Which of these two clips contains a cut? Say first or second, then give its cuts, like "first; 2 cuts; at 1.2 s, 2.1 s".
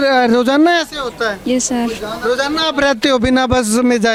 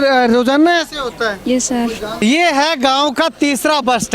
second; 1 cut; at 2.1 s